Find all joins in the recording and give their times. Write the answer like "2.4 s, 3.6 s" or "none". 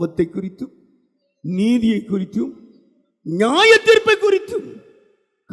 none

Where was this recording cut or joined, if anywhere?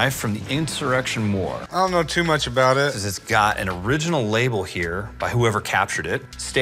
1.6 s

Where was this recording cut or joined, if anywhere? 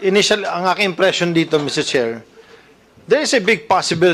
none

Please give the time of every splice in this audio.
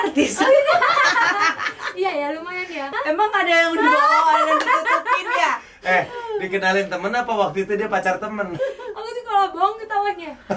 2.9 s, 8.5 s

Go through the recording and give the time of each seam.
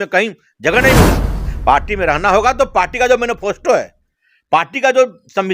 1.3 s

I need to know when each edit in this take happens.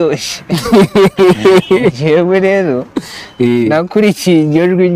none

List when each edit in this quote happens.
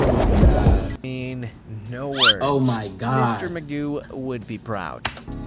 1.0 s

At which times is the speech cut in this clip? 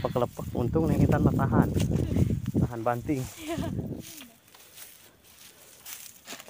4.0 s

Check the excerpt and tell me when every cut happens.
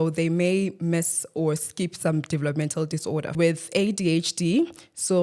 3.4 s

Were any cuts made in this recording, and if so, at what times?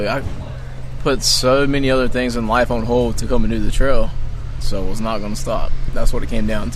4.6 s, 5.8 s

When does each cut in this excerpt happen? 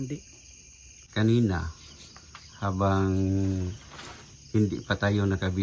1.0 s

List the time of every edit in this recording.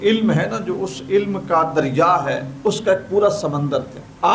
2.5 s

